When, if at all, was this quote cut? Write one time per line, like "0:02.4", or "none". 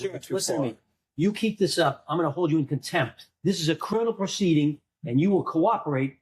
none